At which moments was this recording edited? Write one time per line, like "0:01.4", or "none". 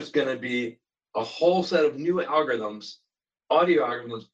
none